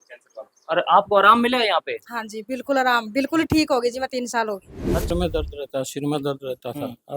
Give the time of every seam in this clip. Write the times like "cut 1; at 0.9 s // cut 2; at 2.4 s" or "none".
cut 1; at 5.1 s